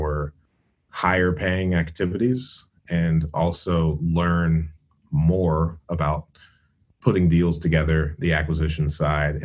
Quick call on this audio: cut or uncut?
uncut